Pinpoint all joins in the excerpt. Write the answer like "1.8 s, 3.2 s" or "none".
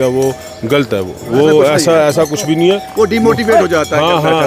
none